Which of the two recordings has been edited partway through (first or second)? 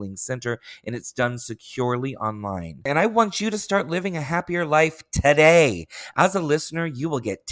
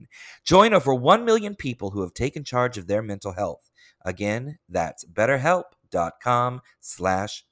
first